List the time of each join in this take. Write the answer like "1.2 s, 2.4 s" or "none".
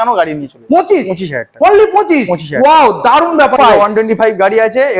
3.5 s